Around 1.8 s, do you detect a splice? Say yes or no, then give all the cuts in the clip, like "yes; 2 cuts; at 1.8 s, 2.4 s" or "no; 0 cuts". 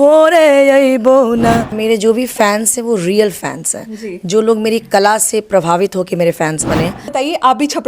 yes; 2 cuts; at 1.8 s, 7.0 s